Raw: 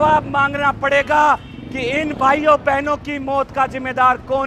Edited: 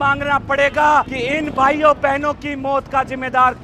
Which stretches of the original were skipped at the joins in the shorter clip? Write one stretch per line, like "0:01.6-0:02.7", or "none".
0:01.5-0:01.8